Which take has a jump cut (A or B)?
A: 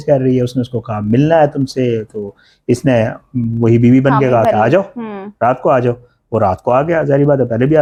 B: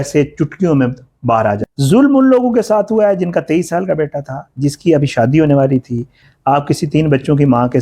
B